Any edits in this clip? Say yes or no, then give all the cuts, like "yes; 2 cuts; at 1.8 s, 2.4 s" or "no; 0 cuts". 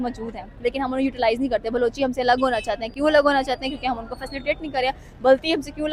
no; 0 cuts